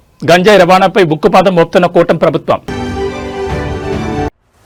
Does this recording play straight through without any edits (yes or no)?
yes